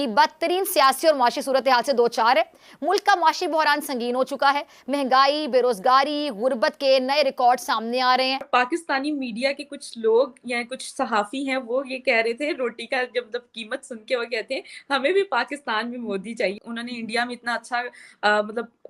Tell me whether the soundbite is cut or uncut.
cut